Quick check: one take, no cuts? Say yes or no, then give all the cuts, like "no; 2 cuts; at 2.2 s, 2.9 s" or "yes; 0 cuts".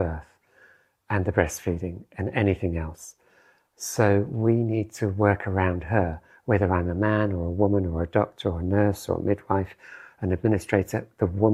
yes; 0 cuts